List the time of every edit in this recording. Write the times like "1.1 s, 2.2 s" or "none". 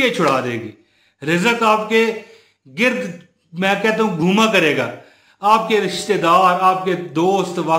none